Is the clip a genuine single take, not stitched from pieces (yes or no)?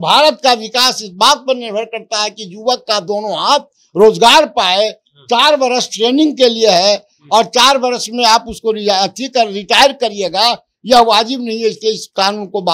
yes